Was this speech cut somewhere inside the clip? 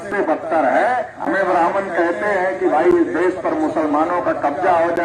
yes; 1 cut; at 1.1 s

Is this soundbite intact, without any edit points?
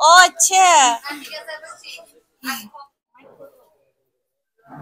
no; 1 cut; at 3.0 s

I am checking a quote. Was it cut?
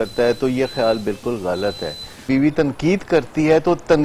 yes; 1 cut; at 2.2 s

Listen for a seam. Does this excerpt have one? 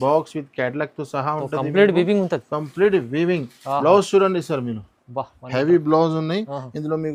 no; 0 cuts

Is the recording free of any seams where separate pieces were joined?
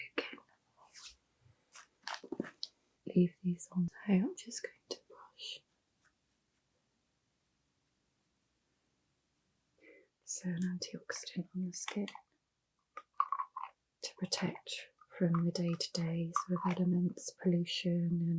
no; 1 cut; at 9.8 s

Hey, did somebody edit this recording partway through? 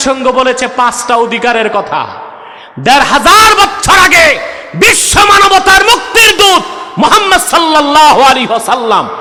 no; 0 cuts

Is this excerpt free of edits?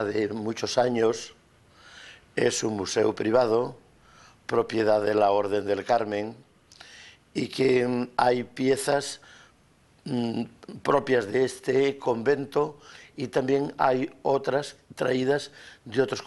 yes; 0 cuts

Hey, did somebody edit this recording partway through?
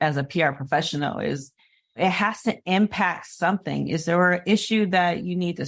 yes; 1 cut; at 2.0 s

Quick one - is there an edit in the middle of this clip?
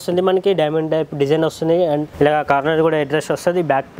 yes; 1 cut; at 2.1 s

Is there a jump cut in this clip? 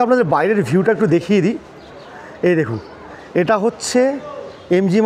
no; 0 cuts

